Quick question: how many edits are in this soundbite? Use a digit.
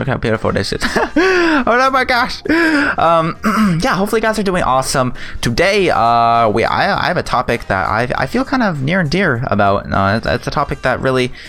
1